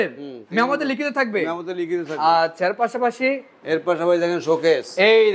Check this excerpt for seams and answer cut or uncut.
uncut